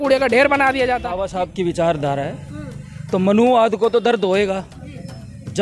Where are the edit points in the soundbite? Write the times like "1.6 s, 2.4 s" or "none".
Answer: 1.2 s